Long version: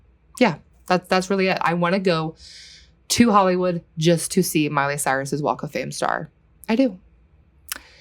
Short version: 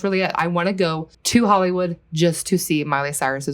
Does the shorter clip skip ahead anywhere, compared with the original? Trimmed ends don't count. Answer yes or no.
yes